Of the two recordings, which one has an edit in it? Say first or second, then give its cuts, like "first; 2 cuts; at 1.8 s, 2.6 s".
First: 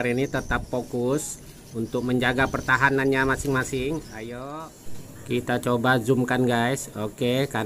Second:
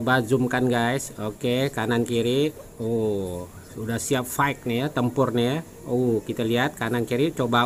first; 1 cut; at 4.5 s